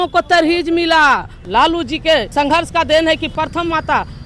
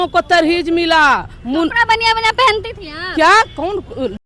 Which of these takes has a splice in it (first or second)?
first